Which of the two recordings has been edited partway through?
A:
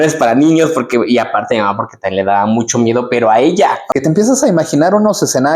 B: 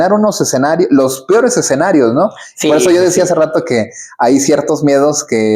A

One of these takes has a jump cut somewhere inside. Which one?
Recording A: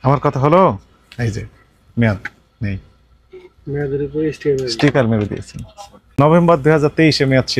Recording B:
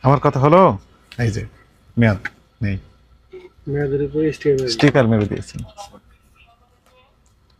A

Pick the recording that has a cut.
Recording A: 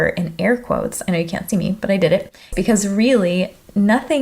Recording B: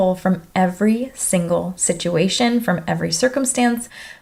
A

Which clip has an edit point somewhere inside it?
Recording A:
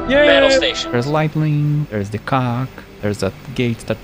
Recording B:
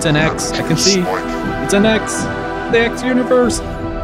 A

